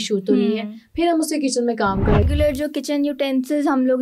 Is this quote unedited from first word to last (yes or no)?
no